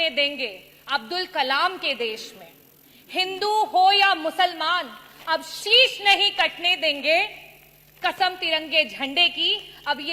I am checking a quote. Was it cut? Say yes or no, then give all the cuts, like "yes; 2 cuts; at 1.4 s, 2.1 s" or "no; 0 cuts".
no; 0 cuts